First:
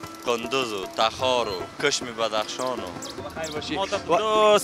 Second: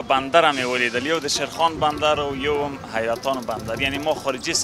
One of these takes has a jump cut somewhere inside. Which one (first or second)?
first